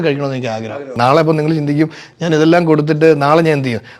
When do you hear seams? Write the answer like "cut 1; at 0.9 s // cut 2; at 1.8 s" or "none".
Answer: cut 1; at 0.9 s

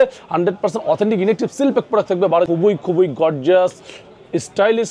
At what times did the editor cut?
cut 1; at 2.5 s

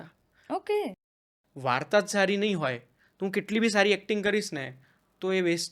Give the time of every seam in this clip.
cut 1; at 1.0 s

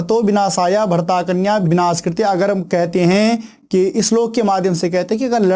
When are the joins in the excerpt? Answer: cut 1; at 1.6 s

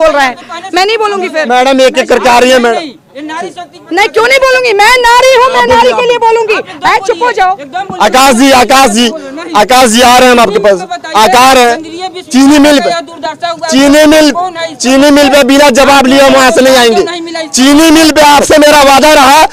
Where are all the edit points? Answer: none

